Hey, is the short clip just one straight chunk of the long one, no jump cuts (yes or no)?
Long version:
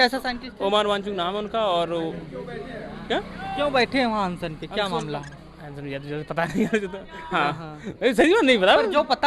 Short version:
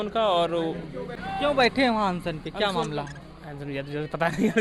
no